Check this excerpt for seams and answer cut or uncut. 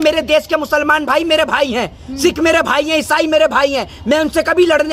uncut